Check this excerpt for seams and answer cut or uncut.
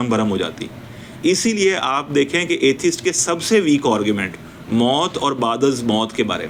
uncut